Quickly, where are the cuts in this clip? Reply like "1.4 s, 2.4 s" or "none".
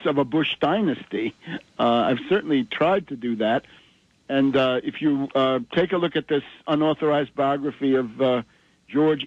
2.1 s